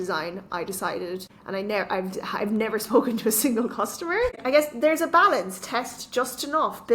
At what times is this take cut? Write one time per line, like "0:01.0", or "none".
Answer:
0:01.3
0:04.4